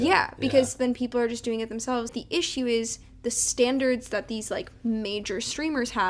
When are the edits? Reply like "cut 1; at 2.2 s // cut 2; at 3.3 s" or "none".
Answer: cut 1; at 2.1 s